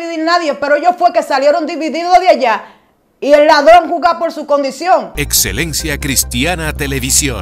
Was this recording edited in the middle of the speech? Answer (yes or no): yes